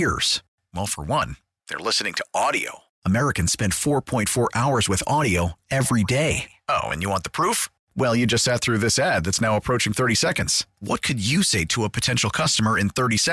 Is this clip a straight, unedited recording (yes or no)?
yes